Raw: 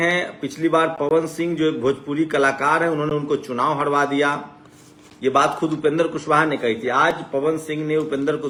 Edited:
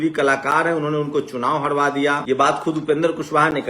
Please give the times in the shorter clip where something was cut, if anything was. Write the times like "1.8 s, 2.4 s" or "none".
2.2 s